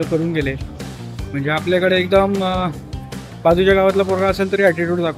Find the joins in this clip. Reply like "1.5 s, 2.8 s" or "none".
none